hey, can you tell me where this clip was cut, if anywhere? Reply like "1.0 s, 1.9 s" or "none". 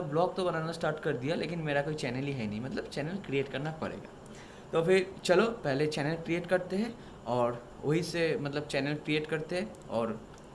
none